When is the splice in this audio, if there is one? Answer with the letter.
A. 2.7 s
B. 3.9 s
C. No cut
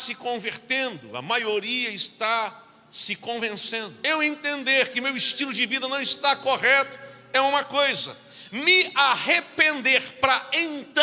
B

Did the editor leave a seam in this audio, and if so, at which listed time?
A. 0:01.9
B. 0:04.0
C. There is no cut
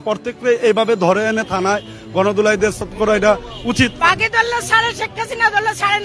B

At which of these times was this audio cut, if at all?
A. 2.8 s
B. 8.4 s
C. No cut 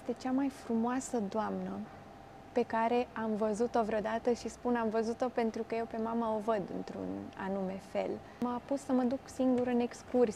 B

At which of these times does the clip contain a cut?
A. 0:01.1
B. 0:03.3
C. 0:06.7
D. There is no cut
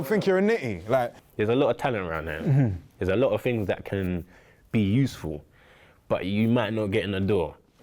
A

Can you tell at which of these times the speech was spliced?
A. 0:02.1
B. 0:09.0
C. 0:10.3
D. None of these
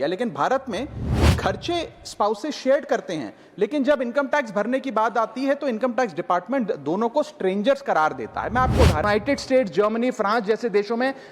B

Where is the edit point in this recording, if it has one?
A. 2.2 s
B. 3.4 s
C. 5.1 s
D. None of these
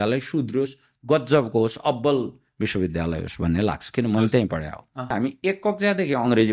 C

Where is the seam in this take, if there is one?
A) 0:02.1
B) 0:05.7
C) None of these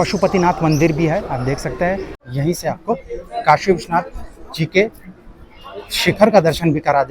A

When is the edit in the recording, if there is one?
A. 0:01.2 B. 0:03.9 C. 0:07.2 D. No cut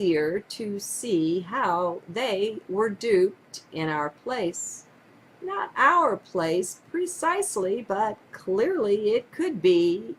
D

